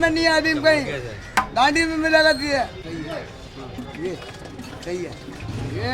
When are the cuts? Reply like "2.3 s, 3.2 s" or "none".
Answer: 2.8 s